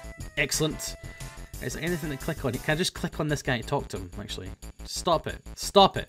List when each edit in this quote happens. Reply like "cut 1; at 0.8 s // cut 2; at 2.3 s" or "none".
cut 1; at 4.2 s